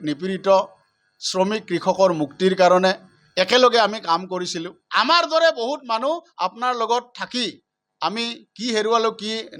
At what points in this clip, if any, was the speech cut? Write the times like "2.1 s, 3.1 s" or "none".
4.8 s